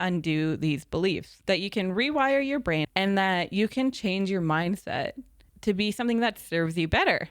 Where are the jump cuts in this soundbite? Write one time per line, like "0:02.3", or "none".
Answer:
0:01.3
0:02.9

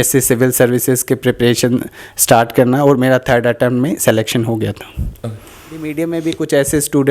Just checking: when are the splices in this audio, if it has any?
0:05.9

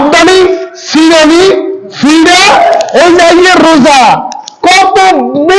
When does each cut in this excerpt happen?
none

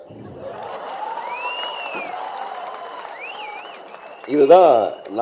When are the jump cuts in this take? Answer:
none

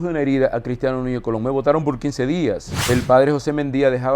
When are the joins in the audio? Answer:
0:02.7

